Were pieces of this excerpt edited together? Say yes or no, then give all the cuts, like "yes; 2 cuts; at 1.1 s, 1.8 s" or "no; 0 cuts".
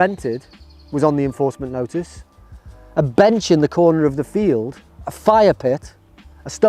no; 0 cuts